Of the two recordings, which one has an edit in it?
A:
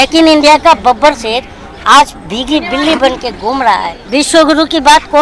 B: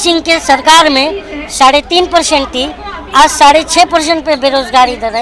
A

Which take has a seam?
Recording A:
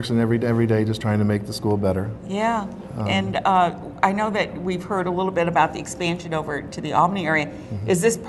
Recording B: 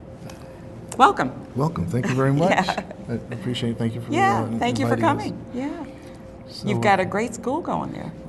B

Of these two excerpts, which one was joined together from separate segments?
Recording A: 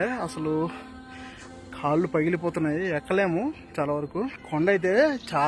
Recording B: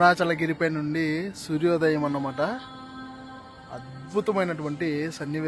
A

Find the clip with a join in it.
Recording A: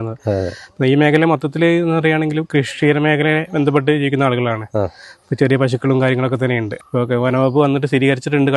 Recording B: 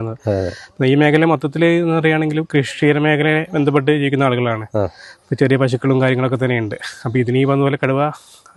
A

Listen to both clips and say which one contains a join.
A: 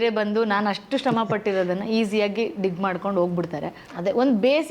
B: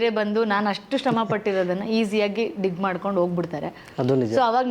A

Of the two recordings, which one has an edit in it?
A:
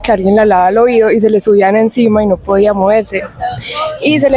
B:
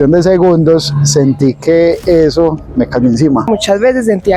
B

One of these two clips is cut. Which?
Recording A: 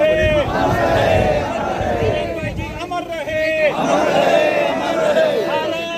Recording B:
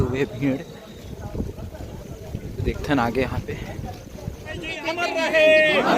B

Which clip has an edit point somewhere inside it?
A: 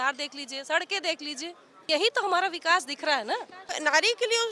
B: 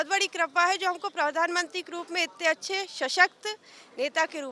A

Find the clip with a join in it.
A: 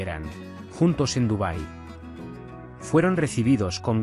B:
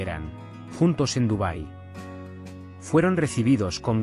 B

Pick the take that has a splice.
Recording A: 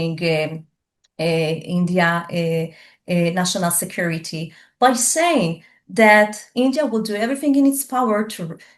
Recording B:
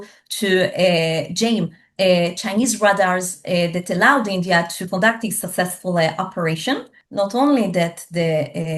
B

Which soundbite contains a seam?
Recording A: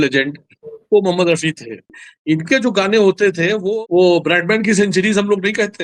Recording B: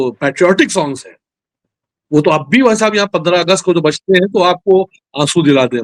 A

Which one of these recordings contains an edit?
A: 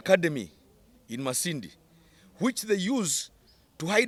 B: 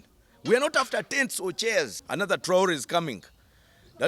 B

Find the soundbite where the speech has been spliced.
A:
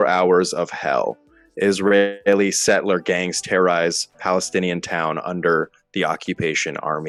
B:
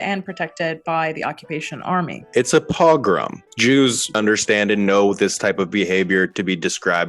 B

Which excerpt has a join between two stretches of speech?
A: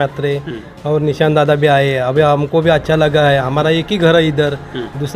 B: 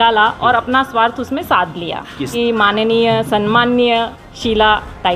B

